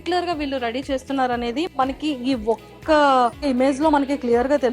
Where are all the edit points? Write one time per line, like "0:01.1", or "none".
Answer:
0:03.4

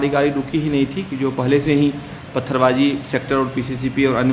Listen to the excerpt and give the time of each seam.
none

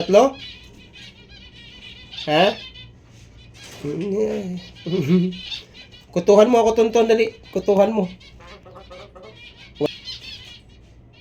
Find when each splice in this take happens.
0:09.9

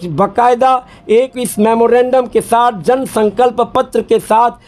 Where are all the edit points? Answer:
none

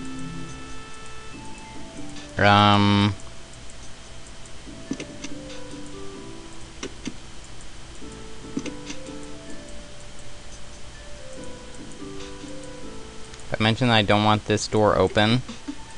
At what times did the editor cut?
0:04.3

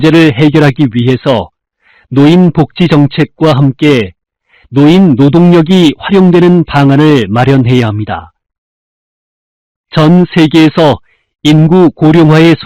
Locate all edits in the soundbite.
none

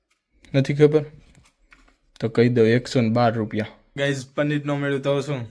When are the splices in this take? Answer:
0:03.8

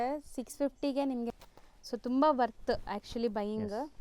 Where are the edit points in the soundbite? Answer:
0:01.3

